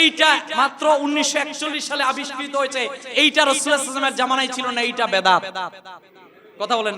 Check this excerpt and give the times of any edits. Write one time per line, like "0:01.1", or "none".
none